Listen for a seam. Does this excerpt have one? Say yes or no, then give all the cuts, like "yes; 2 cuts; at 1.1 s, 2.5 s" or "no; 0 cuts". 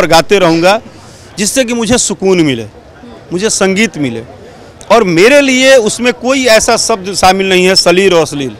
no; 0 cuts